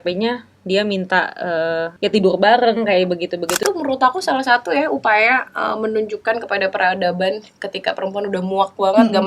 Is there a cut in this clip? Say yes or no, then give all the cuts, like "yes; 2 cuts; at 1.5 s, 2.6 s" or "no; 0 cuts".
yes; 2 cuts; at 1.9 s, 3.6 s